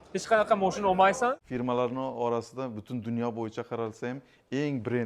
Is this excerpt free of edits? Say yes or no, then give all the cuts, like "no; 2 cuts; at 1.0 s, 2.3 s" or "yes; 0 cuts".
no; 1 cut; at 1.4 s